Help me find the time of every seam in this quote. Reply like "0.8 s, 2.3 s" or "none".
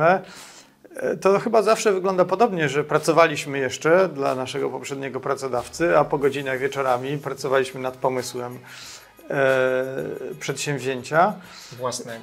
none